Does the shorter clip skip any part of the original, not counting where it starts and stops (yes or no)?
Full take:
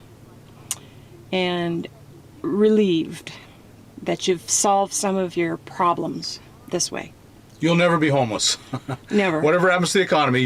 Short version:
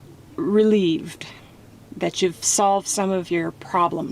no